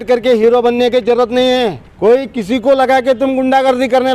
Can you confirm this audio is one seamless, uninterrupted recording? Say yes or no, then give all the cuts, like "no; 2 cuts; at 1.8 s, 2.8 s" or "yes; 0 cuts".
no; 1 cut; at 1.8 s